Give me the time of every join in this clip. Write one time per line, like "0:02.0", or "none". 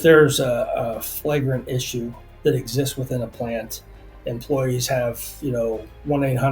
0:02.2